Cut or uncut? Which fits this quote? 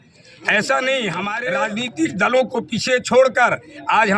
cut